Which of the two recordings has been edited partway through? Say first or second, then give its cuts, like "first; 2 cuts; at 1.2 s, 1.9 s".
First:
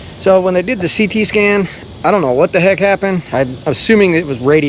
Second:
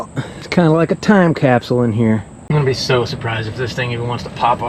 second; 1 cut; at 2.4 s